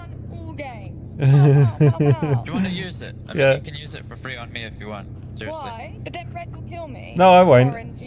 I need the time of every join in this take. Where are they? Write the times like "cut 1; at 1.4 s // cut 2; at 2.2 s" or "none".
none